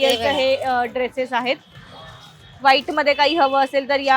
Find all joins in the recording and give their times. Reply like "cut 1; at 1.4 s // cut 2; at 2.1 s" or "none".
none